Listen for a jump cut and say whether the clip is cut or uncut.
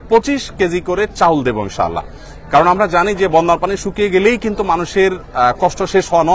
uncut